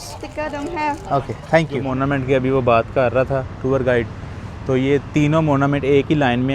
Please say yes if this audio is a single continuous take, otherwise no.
no